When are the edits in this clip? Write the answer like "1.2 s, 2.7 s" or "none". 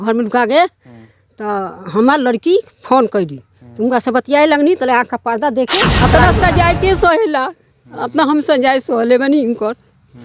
5.9 s